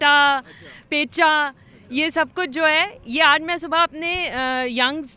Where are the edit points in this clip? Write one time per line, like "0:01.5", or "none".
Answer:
none